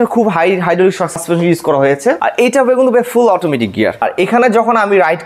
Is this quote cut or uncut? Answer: cut